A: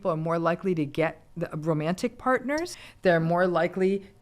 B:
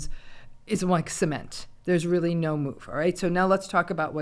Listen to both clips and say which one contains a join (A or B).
A